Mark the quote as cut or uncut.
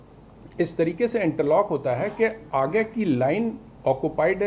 uncut